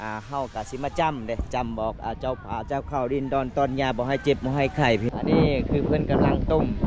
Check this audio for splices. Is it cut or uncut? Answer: cut